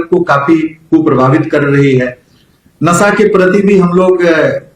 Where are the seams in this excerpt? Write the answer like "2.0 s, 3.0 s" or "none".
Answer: none